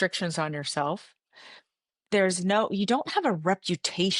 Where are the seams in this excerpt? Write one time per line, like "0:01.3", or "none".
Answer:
none

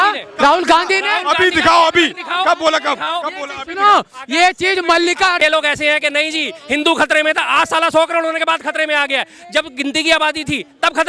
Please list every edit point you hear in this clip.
0:05.4

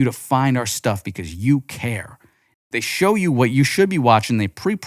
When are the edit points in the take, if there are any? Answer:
0:02.5

